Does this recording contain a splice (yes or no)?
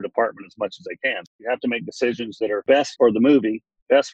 yes